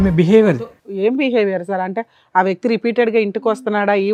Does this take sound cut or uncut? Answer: uncut